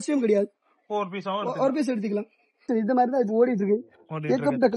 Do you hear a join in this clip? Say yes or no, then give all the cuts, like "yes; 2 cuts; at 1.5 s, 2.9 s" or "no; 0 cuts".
yes; 1 cut; at 2.7 s